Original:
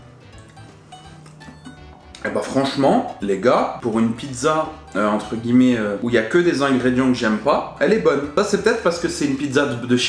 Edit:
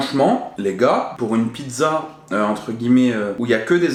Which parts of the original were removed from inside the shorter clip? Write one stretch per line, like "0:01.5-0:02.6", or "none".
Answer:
none